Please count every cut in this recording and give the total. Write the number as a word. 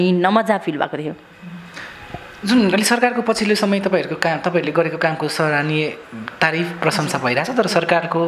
zero